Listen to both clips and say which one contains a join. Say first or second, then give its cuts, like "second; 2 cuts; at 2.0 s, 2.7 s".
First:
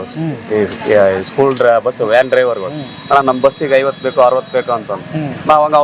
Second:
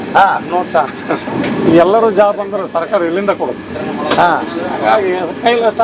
second; 1 cut; at 1.2 s